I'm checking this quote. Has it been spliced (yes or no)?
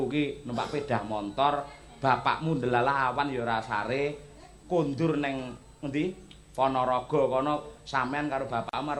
no